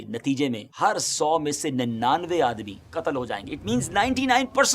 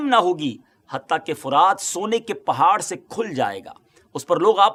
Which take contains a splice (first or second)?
first